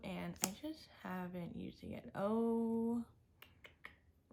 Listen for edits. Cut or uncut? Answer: uncut